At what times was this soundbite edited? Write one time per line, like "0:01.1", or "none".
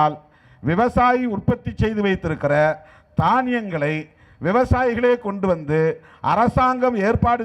none